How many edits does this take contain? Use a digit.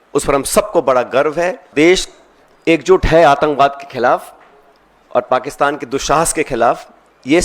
1